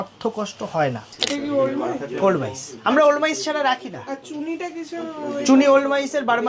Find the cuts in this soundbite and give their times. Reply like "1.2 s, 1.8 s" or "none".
1.1 s